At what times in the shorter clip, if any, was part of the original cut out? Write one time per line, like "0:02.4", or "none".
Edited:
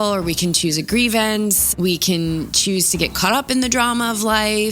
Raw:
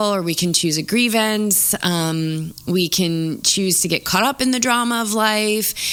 0:01.7